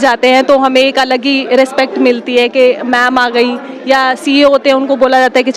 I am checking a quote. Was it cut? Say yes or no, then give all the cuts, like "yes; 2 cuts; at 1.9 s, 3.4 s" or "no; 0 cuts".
no; 0 cuts